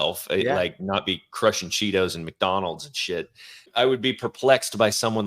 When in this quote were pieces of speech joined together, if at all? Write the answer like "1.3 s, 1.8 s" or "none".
3.7 s